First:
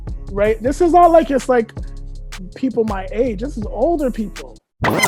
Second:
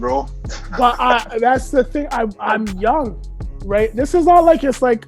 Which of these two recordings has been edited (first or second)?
second